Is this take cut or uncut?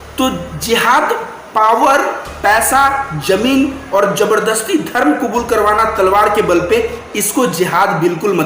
uncut